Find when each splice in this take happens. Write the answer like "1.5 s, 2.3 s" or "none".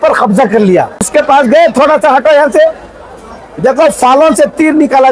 1.1 s